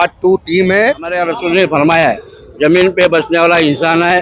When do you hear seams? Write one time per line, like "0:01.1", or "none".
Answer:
0:01.1

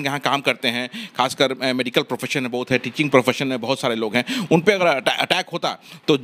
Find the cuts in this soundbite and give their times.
none

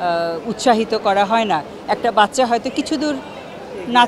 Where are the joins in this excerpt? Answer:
none

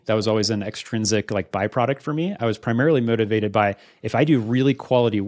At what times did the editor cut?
none

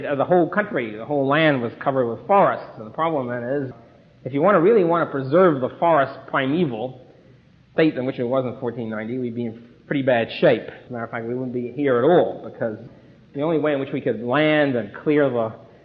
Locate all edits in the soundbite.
0:11.3

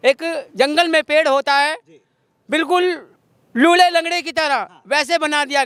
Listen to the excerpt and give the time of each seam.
none

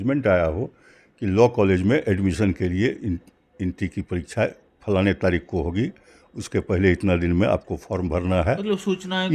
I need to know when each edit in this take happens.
none

